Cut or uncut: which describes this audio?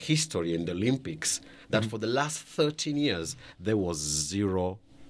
uncut